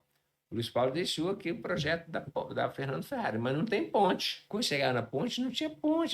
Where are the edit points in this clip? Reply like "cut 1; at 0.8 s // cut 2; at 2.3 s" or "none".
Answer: cut 1; at 4.3 s